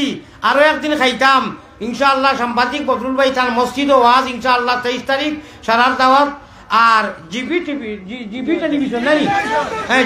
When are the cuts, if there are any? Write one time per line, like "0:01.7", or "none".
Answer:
none